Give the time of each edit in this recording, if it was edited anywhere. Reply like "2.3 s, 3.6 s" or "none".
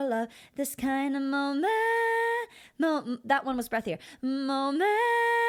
none